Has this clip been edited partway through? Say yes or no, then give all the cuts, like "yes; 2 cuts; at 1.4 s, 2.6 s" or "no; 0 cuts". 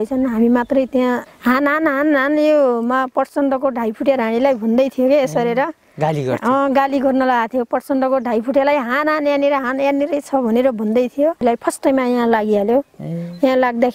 yes; 2 cuts; at 1.3 s, 11.4 s